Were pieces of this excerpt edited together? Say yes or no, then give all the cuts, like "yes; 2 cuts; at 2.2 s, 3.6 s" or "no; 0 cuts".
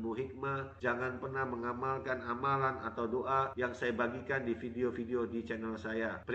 no; 0 cuts